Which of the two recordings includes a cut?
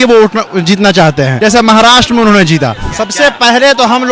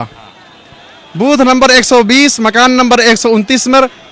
first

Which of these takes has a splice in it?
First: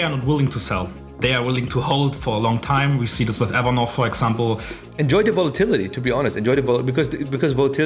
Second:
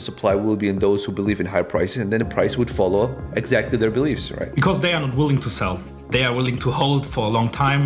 first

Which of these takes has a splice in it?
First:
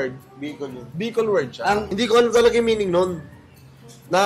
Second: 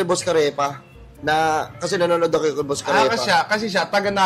first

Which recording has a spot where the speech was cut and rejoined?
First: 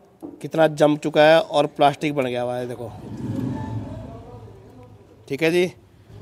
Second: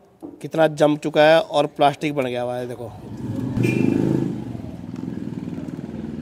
second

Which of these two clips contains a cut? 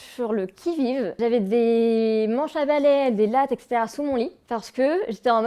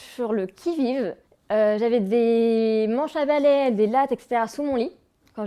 first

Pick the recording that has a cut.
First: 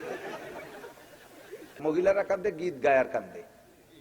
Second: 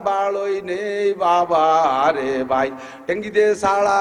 first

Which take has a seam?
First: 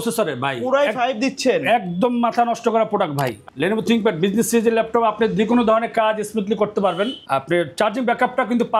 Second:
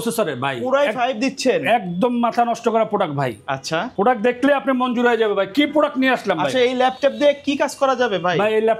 first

